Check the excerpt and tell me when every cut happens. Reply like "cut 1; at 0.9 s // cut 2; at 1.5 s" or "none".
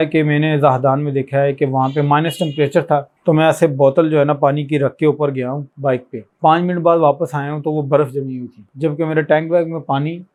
none